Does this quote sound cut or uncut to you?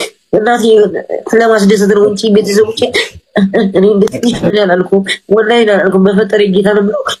cut